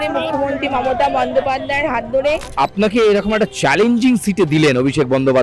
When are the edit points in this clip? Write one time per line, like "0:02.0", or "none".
0:02.5